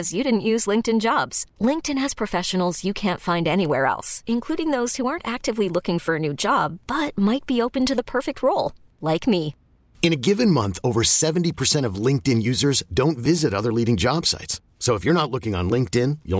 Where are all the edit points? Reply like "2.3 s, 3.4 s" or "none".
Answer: none